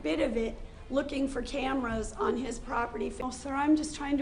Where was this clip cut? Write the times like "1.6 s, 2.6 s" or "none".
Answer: 3.2 s

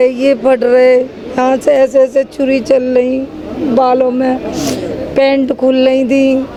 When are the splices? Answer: none

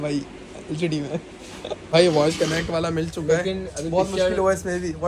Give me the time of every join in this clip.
1.9 s

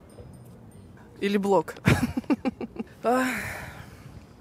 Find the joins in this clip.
1.0 s

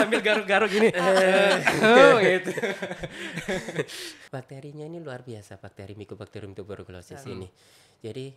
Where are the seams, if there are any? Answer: 4.1 s

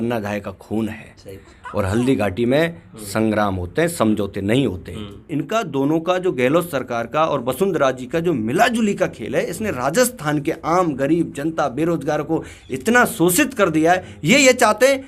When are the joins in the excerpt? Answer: 5.3 s

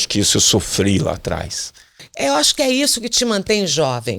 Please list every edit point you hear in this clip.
2.0 s

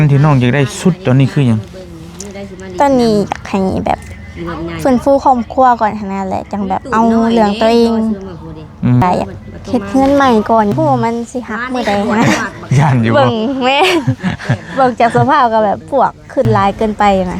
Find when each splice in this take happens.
9.0 s, 10.7 s

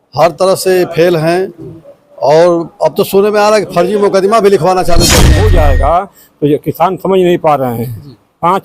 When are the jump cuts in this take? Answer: 5.3 s

